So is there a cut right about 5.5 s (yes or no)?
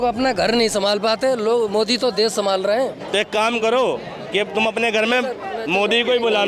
no